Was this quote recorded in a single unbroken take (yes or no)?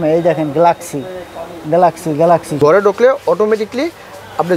no